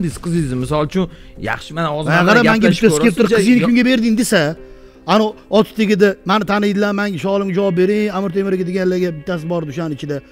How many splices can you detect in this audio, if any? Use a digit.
0